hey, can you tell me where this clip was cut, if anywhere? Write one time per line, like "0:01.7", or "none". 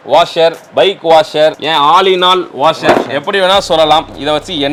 none